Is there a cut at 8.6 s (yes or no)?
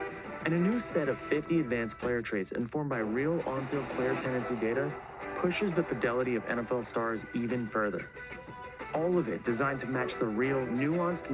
no